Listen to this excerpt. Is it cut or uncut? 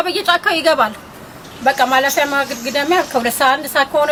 uncut